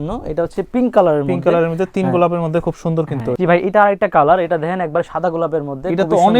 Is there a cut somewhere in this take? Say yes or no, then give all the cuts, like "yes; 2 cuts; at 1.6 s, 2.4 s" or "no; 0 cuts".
yes; 1 cut; at 3.3 s